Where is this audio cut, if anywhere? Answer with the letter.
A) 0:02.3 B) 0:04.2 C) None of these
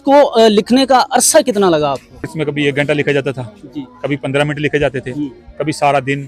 A